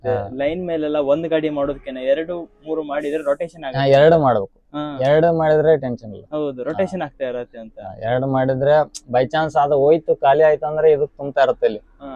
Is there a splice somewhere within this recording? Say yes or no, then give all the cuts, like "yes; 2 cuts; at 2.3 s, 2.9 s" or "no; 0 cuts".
no; 0 cuts